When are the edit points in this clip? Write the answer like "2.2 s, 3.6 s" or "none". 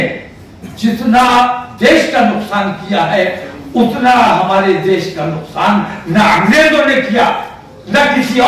none